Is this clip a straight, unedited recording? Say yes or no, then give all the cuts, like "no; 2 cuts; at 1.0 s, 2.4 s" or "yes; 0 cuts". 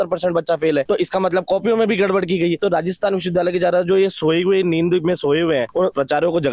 yes; 0 cuts